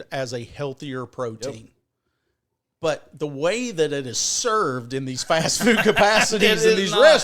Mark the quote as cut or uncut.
uncut